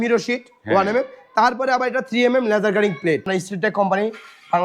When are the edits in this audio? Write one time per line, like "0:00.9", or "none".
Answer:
0:03.3

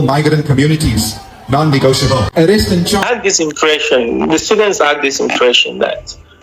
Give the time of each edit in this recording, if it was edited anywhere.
0:03.0

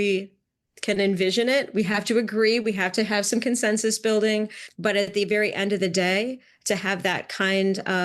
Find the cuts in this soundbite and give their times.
0:04.6

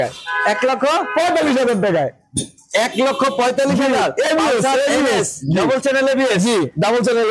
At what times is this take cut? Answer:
none

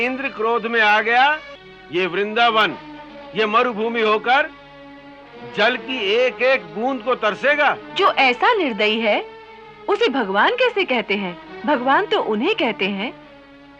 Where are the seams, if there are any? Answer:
0:01.8
0:07.8
0:11.5

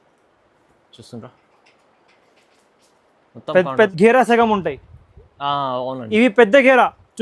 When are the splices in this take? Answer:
0:03.9

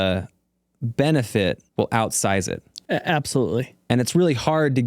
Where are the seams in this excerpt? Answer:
0:01.6
0:02.7
0:03.7

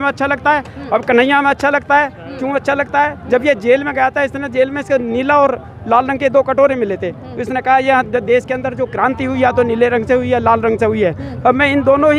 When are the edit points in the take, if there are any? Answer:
none

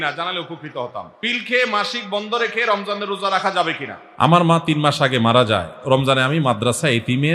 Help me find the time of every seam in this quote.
0:01.1
0:04.3

